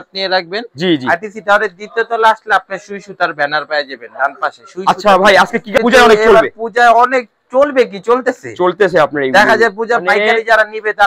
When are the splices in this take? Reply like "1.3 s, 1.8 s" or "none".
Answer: 5.8 s